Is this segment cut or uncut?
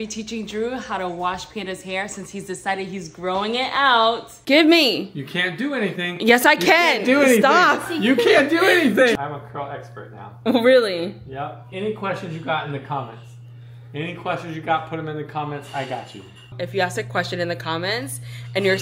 cut